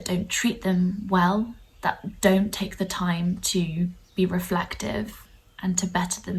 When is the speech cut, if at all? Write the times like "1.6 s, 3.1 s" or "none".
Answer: 4.0 s